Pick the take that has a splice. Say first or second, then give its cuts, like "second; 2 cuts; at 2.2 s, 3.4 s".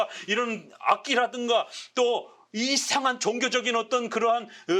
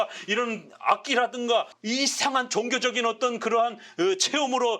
second; 1 cut; at 1.8 s